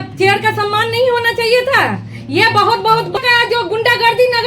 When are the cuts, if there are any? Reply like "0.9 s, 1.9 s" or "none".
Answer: 3.2 s